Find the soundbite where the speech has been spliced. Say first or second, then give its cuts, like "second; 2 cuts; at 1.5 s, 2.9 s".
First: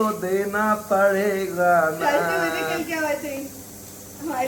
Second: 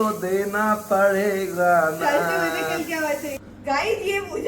second; 1 cut; at 3.4 s